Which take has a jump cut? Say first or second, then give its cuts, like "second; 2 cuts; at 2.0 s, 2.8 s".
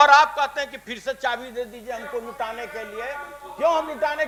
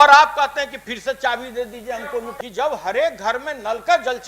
second; 1 cut; at 2.3 s